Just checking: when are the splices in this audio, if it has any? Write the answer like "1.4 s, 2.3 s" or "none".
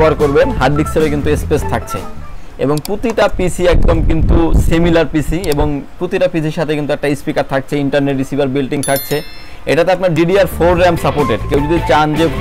none